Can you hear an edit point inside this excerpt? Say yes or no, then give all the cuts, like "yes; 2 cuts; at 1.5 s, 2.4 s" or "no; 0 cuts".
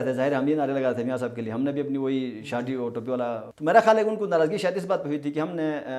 yes; 1 cut; at 3.5 s